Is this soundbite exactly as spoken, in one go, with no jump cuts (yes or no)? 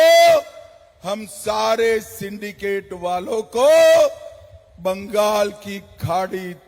yes